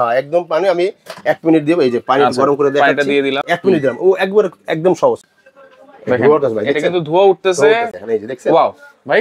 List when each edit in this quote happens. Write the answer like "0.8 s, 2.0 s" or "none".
3.4 s, 5.3 s, 7.9 s